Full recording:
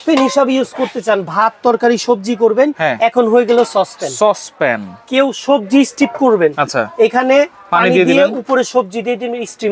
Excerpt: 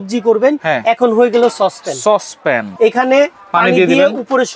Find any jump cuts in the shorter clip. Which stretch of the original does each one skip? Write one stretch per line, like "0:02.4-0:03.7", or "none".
0:04.9-0:06.9